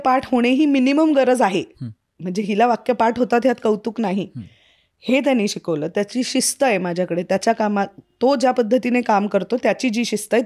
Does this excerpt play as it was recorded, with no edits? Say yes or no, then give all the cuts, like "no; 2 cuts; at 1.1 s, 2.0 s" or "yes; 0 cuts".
yes; 0 cuts